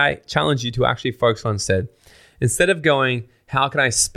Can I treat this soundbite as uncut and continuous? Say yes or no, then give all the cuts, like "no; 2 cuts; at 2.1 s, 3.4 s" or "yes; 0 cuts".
yes; 0 cuts